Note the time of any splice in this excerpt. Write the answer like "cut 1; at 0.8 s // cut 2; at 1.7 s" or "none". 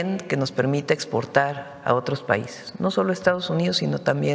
none